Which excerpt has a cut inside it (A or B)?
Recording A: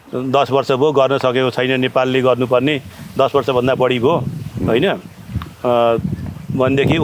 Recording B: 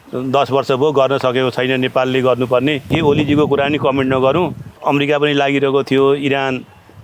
B